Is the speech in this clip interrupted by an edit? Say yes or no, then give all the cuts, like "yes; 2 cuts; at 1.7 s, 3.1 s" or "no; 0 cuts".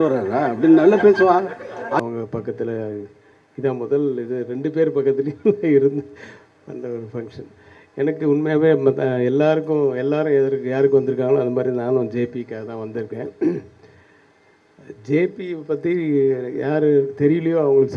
yes; 1 cut; at 2.0 s